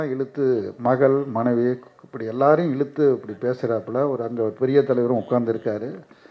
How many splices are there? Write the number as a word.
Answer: zero